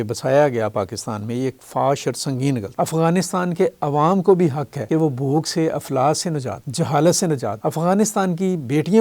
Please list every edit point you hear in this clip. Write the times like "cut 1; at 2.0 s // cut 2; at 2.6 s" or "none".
cut 1; at 2.7 s